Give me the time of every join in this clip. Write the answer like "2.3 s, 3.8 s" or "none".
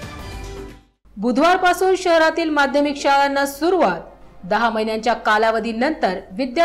1.1 s